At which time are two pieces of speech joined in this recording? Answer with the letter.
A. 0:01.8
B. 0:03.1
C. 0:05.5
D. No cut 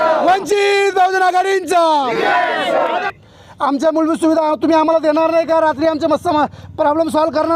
B